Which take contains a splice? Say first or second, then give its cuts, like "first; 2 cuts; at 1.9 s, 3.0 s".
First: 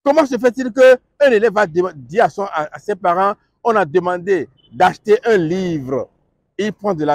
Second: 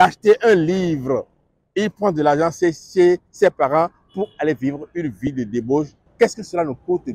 second; 1 cut; at 6.0 s